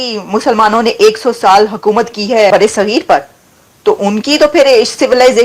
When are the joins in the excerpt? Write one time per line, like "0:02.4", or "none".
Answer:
0:02.5

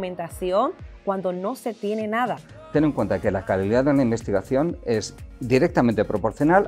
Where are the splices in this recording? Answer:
0:02.5

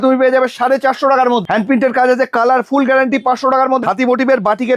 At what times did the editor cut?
0:01.4
0:03.8

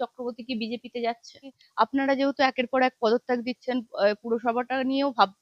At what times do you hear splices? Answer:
0:01.5

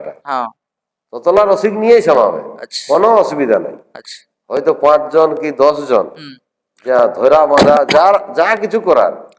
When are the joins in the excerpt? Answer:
none

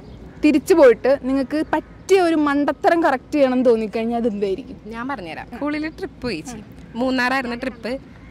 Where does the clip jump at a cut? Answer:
0:05.3

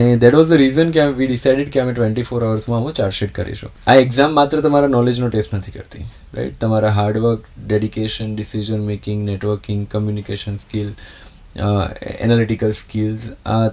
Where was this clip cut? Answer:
0:03.7

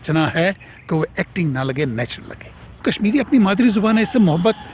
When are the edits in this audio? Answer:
0:02.8

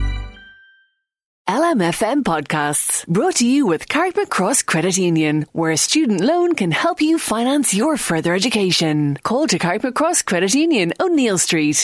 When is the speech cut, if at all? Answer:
0:01.3

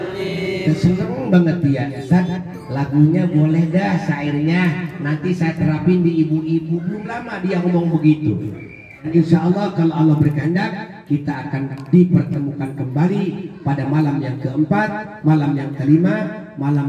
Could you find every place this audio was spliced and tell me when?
0:08.9

